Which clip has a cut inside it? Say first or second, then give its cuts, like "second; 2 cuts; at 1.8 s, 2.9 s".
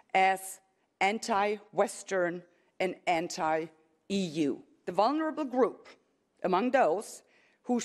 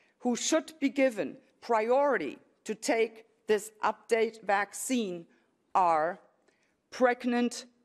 first; 1 cut; at 4.7 s